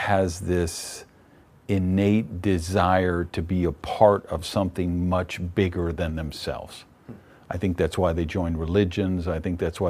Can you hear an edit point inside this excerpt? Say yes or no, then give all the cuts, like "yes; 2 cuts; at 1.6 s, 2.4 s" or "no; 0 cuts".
no; 0 cuts